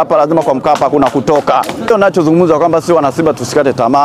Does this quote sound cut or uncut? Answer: cut